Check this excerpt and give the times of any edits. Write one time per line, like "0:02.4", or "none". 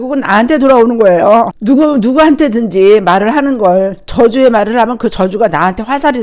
none

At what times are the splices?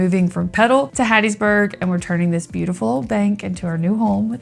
0:00.9

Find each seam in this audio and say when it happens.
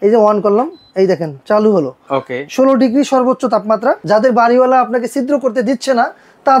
0:04.0

